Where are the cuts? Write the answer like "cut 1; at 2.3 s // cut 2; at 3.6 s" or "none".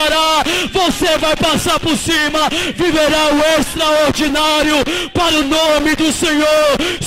none